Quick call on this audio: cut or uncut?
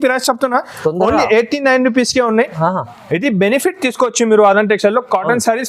uncut